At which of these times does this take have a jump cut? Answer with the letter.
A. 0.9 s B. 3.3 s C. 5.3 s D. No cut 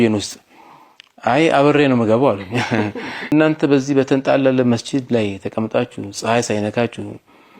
B